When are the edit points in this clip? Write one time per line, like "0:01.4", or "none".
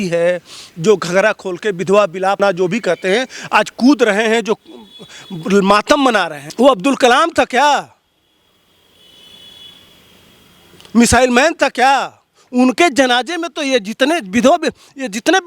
0:06.4